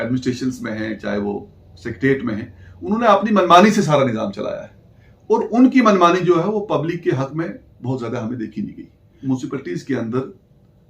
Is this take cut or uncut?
cut